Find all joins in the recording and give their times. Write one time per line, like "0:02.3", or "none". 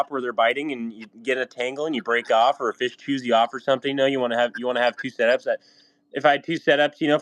none